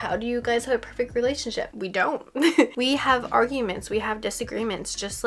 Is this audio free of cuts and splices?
no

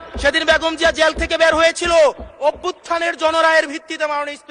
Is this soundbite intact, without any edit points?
yes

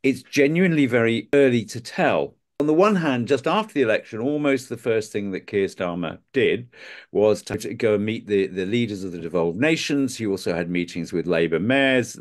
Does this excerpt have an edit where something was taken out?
yes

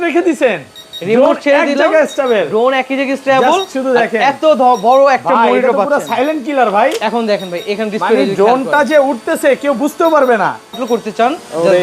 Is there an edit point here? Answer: yes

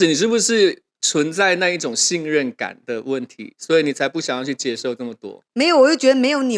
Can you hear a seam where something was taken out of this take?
no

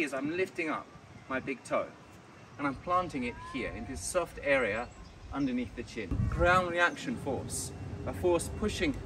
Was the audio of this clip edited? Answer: yes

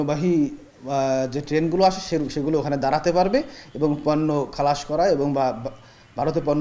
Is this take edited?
no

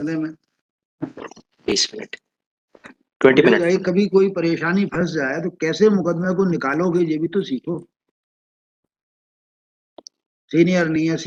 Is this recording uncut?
yes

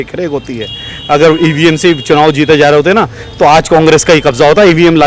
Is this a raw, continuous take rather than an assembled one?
yes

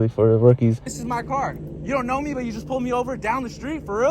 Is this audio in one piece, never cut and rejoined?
no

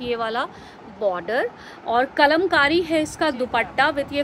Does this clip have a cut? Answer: no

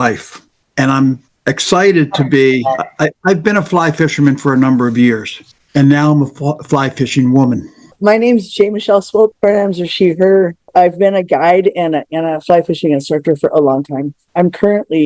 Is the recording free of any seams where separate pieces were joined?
no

